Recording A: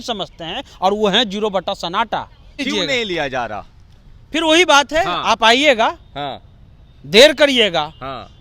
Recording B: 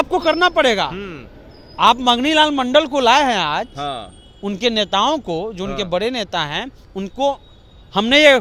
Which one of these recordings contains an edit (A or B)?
A